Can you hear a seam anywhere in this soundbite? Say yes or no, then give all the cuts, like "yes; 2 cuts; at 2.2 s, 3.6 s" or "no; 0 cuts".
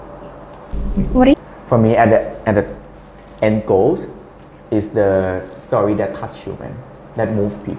yes; 1 cut; at 1.3 s